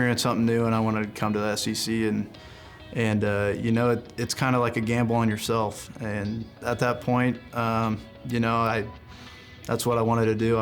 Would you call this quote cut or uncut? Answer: cut